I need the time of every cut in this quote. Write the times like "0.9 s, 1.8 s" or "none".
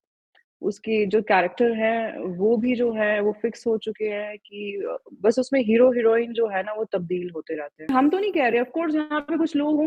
7.9 s

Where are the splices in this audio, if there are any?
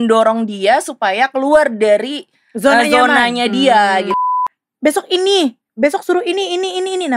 4.2 s

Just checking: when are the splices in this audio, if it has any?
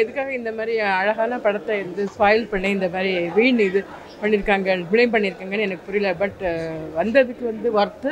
none

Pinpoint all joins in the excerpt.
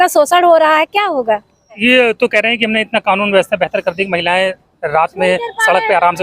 1.7 s

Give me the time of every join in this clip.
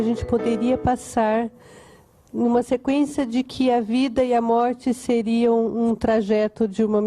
none

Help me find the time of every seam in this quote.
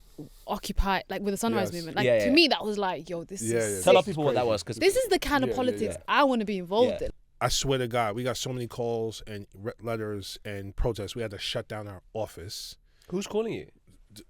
7.1 s

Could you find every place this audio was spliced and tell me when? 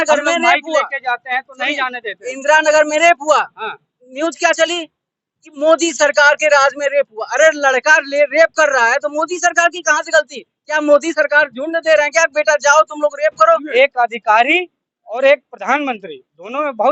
13.6 s

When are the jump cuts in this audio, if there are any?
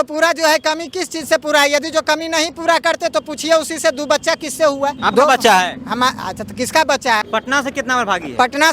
5.0 s, 7.0 s

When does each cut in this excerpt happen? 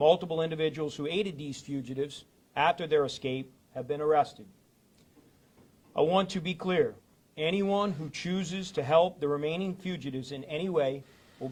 none

